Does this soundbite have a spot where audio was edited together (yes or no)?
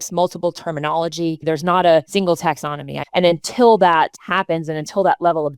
yes